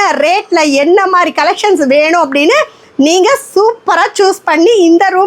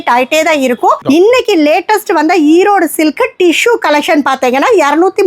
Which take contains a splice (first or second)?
second